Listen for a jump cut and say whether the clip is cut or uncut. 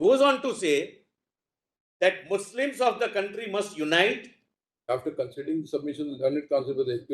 cut